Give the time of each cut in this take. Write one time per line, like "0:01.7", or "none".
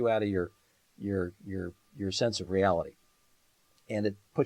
none